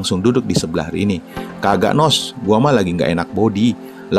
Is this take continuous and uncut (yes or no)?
yes